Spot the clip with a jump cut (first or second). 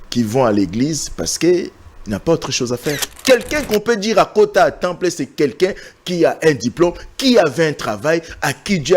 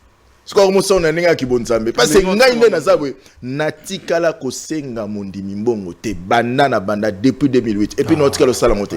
first